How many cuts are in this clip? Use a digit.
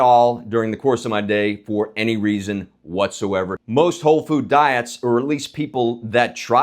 1